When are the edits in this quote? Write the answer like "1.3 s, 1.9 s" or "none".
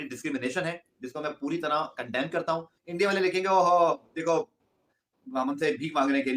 2.8 s